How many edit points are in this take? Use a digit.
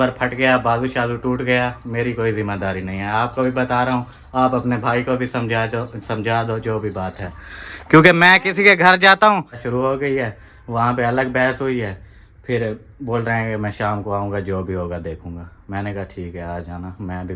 1